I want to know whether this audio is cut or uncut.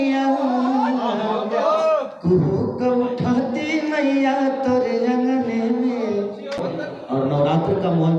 cut